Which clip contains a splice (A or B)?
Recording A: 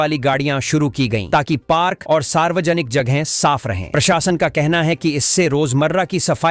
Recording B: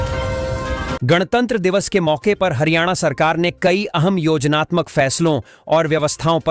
B